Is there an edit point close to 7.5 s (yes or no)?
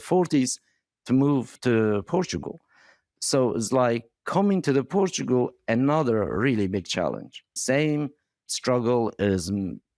yes